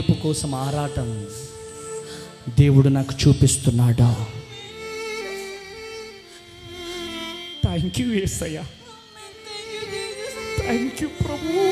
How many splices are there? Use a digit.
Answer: 0